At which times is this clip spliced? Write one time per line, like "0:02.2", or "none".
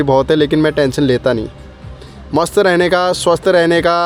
none